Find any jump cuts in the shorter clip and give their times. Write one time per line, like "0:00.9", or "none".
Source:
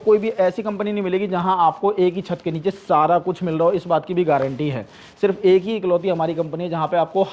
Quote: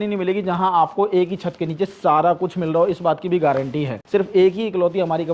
0:03.9